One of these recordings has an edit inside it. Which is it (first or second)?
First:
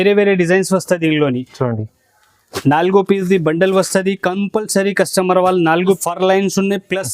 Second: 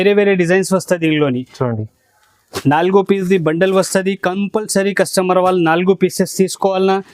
first